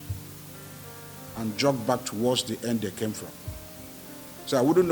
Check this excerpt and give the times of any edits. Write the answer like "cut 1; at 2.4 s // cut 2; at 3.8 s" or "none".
none